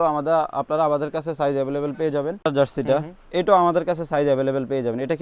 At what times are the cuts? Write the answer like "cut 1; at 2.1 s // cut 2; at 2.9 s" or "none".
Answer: cut 1; at 2.5 s